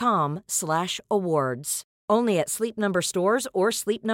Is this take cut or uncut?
uncut